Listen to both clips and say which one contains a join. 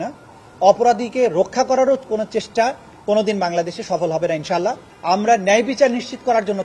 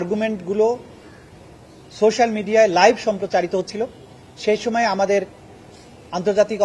first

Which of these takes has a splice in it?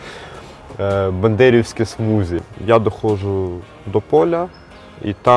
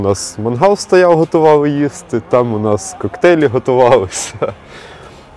first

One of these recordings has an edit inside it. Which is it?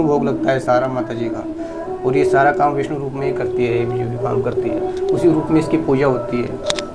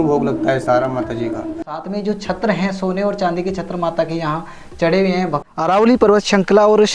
second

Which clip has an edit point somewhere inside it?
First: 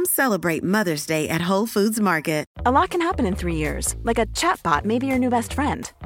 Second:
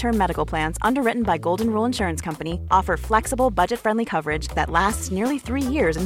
first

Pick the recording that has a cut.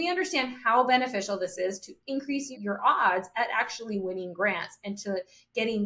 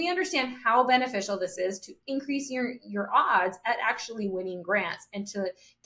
first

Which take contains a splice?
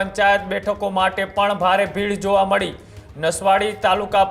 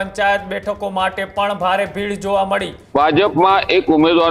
second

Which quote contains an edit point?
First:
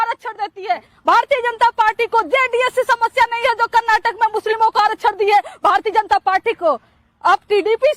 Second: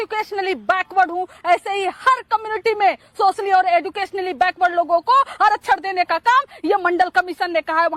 first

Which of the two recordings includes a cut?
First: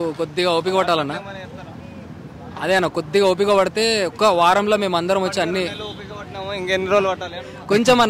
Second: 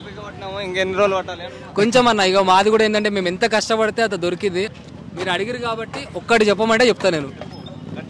second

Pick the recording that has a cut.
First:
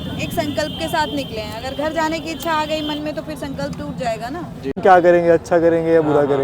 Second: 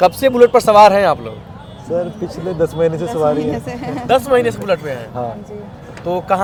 first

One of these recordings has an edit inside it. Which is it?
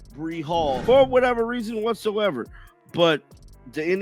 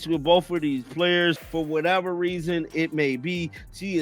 second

